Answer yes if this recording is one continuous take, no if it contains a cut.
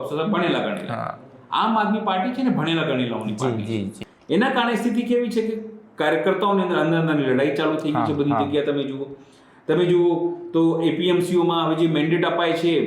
no